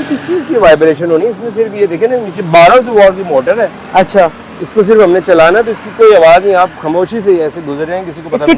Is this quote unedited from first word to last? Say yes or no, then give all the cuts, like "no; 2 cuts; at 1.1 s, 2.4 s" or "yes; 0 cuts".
yes; 0 cuts